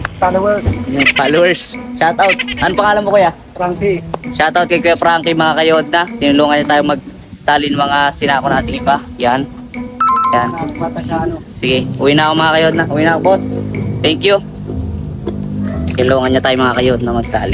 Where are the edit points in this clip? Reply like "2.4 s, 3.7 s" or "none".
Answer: none